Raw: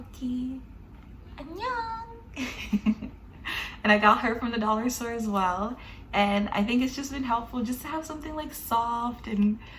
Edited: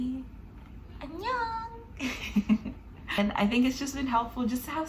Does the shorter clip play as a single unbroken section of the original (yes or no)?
no